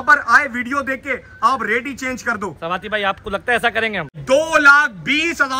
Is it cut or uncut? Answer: cut